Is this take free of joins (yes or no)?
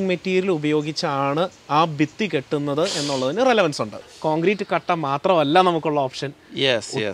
no